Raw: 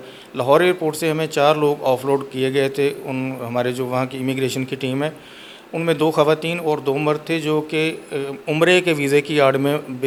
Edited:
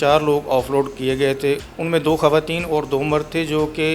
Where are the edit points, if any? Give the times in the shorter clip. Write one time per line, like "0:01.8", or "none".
0:01.7